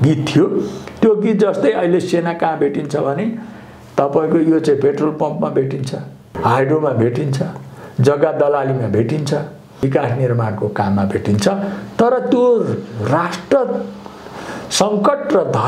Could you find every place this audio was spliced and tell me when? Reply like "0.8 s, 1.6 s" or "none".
6.4 s, 9.8 s